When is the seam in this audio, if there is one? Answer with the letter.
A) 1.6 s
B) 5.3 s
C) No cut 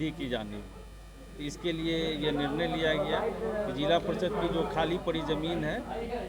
C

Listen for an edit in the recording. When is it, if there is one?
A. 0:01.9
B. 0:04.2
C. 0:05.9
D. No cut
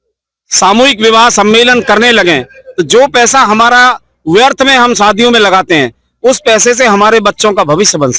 D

